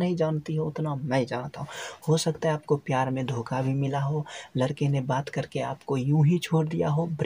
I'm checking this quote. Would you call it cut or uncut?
uncut